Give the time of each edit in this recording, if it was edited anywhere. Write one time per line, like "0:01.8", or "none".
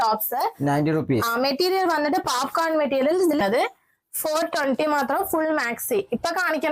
0:03.4